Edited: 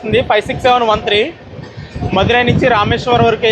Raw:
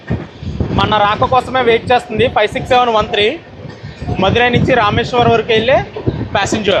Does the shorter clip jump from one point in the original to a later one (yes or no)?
no